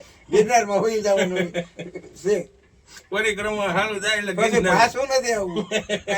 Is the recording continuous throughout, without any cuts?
yes; 0 cuts

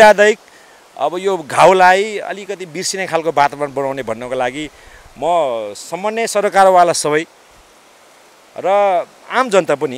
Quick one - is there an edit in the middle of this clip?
no; 0 cuts

